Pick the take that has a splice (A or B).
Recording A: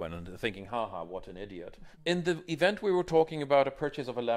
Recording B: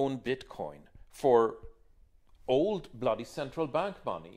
A